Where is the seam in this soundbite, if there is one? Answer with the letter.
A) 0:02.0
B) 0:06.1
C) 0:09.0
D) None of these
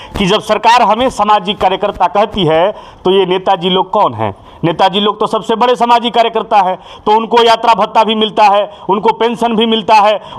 D